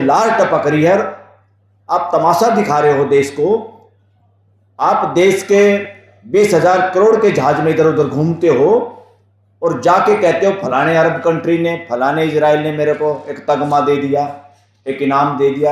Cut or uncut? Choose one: uncut